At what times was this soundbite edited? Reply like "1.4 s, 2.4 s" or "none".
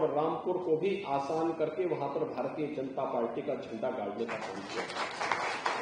none